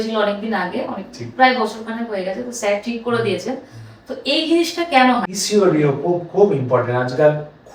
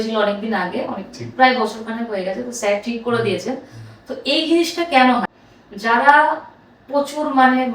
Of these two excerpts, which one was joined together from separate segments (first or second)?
second